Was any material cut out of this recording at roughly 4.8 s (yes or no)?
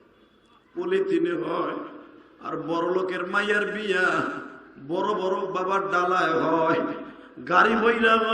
no